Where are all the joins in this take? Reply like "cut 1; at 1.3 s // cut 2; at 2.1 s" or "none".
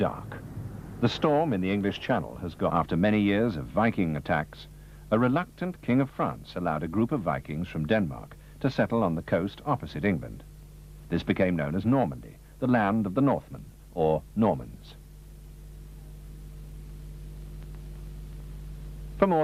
none